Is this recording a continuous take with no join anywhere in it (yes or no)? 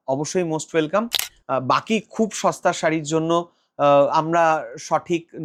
yes